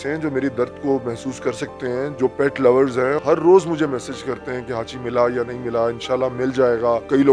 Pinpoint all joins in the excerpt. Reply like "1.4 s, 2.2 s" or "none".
none